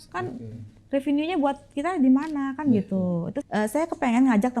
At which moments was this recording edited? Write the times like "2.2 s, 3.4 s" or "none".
3.4 s